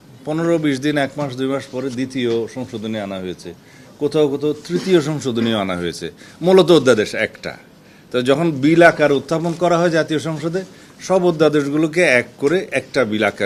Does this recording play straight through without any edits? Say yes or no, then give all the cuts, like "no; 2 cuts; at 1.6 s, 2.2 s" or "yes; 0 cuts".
yes; 0 cuts